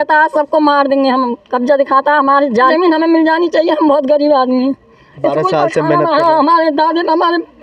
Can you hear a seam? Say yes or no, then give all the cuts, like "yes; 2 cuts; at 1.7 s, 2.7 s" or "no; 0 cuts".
yes; 1 cut; at 2.7 s